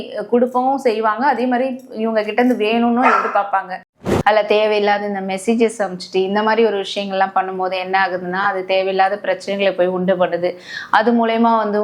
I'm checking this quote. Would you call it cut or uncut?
cut